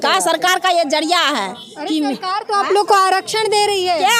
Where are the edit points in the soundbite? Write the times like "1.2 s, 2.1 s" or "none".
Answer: none